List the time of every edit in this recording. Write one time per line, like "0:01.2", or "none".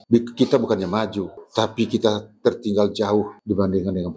0:01.4
0:03.3